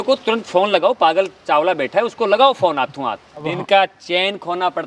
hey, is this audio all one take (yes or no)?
no